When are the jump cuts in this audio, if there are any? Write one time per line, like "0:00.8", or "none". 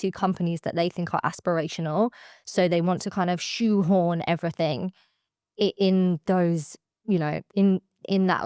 none